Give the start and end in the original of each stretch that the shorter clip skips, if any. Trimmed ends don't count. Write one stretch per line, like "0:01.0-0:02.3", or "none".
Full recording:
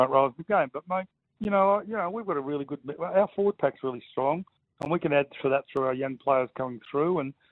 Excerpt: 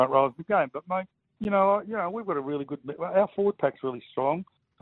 none